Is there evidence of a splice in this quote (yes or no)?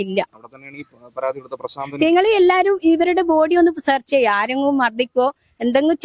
no